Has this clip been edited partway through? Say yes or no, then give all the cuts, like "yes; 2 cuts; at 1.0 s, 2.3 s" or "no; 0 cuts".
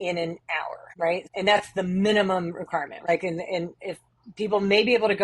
yes; 2 cuts; at 1.2 s, 3.1 s